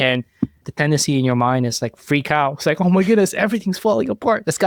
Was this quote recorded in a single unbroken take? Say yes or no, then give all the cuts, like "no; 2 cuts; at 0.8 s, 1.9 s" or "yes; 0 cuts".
yes; 0 cuts